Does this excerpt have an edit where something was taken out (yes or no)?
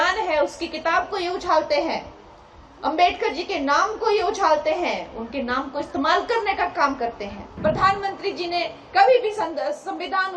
yes